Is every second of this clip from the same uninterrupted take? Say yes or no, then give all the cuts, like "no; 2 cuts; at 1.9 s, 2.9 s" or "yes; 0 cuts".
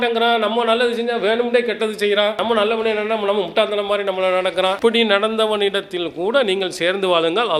yes; 0 cuts